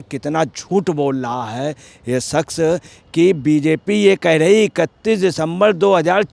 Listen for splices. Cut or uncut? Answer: uncut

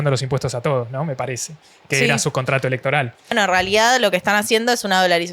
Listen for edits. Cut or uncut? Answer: cut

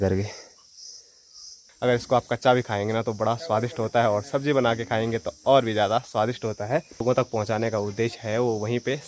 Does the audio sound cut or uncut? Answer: cut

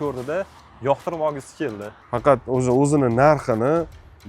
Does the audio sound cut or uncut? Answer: cut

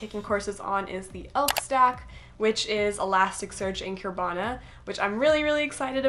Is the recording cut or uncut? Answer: uncut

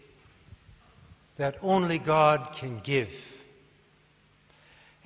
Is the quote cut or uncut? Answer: uncut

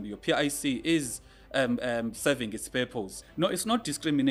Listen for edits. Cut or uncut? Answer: cut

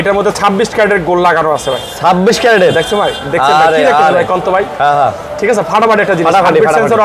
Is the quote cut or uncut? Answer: uncut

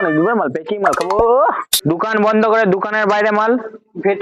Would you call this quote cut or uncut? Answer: cut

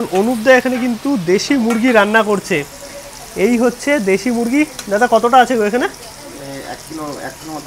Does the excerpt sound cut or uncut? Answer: uncut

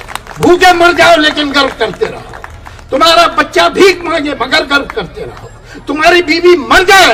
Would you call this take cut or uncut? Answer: uncut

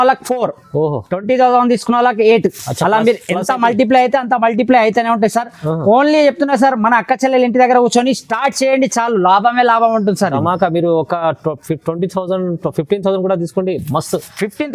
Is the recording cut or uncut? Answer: uncut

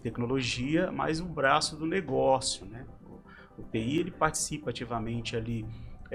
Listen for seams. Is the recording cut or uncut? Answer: uncut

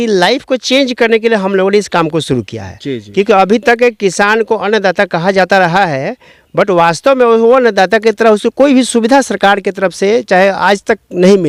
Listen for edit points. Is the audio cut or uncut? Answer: uncut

